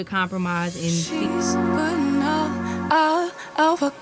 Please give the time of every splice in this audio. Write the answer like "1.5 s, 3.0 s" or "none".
1.1 s